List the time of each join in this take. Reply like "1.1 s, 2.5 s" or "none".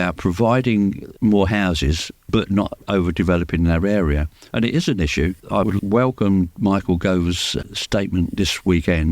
1.1 s, 2.1 s, 2.8 s, 5.4 s, 7.5 s